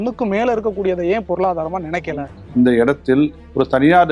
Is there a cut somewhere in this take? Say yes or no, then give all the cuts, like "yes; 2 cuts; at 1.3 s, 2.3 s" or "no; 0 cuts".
yes; 1 cut; at 2.4 s